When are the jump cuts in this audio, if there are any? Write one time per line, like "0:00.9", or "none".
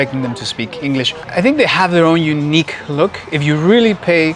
0:01.2